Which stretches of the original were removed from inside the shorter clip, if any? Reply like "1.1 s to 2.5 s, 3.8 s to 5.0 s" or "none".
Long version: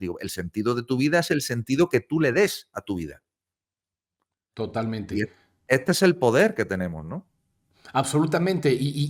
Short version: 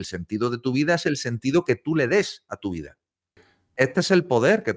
3.8 s to 5.5 s